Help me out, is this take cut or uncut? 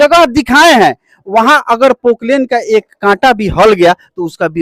uncut